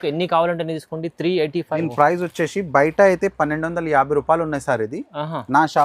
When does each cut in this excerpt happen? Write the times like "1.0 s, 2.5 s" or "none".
1.8 s